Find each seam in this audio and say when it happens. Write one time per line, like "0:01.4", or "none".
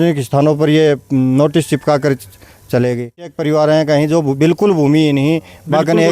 0:03.4